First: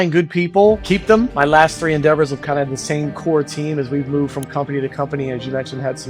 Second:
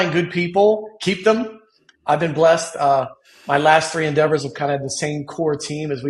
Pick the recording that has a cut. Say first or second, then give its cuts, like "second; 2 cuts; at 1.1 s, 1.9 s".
first; 1 cut; at 1.0 s